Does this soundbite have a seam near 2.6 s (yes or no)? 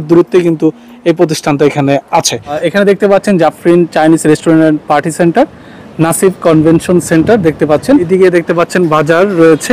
yes